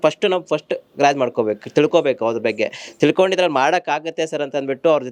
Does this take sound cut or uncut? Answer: uncut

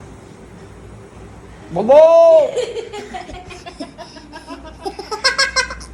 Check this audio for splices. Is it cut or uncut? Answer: uncut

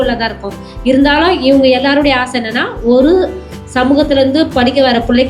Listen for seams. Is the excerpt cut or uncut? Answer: uncut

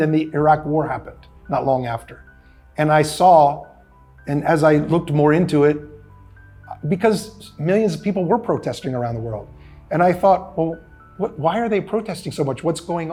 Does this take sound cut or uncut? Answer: uncut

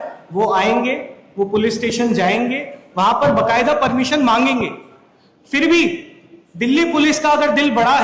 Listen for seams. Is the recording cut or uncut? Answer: uncut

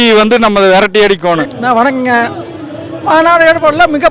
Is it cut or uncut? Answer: cut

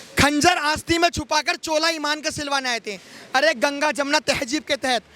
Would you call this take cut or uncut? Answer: uncut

